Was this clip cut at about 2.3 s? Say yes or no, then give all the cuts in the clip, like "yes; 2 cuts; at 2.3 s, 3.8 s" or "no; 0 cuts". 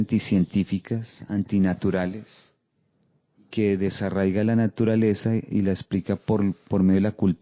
no; 0 cuts